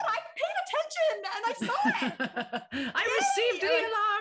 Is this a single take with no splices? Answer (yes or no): yes